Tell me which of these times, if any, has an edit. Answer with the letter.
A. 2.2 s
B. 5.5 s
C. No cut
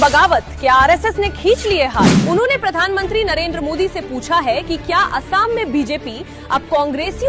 A